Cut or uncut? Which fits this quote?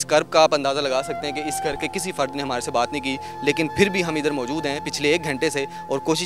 uncut